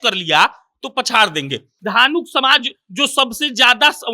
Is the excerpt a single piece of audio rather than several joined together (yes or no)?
no